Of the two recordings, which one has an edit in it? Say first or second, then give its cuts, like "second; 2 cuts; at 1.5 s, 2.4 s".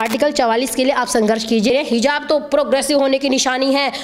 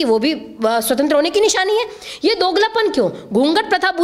first; 1 cut; at 1.7 s